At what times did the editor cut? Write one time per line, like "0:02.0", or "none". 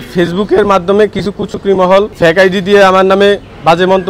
0:02.1